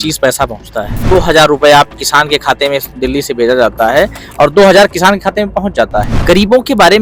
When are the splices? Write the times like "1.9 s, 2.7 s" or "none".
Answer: 1.0 s, 6.1 s